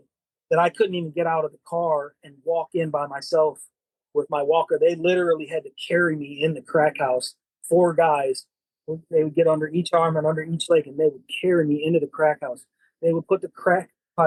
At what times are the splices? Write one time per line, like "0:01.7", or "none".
none